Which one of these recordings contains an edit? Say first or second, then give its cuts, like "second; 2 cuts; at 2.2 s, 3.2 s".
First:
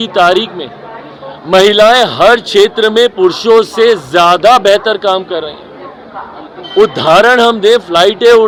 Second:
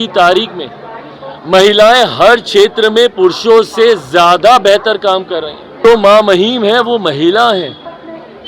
second; 1 cut; at 5.6 s